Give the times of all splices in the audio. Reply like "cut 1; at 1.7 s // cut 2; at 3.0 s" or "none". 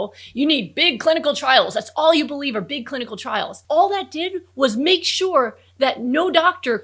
cut 1; at 3.6 s